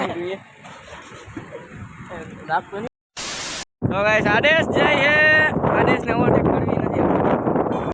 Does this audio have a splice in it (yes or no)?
no